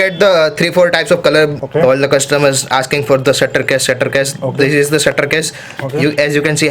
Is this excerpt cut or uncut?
cut